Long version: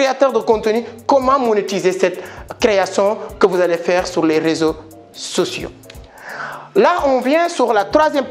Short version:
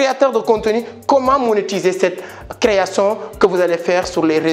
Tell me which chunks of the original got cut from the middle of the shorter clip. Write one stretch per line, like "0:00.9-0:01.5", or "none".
none